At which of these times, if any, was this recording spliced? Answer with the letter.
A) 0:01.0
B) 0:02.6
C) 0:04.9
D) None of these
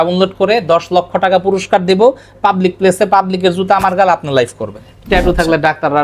C